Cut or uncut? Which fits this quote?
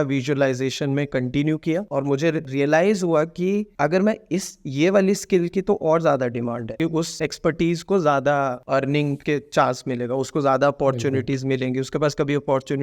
cut